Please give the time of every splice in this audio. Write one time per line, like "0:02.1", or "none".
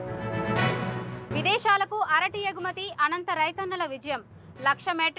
0:00.9